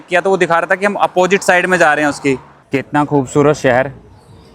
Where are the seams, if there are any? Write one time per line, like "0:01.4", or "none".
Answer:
0:02.5

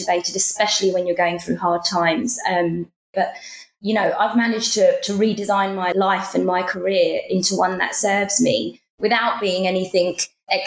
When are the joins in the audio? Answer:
0:03.1

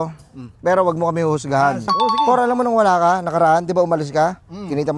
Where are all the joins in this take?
0:01.9

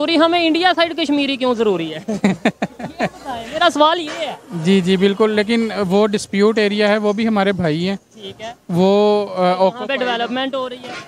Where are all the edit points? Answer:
none

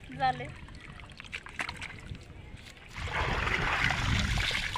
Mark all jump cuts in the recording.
0:03.0

